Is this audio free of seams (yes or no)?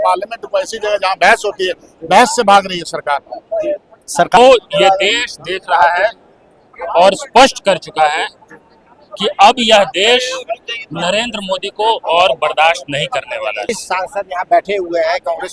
no